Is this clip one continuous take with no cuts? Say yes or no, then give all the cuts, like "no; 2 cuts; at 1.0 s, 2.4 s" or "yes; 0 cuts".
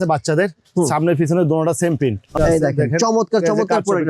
no; 1 cut; at 2.3 s